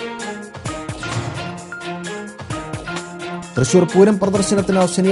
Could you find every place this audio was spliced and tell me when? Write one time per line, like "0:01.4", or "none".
0:01.0